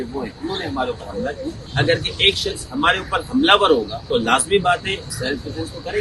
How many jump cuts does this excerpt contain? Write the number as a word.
three